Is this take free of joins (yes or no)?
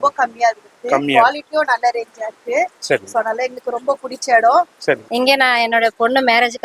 no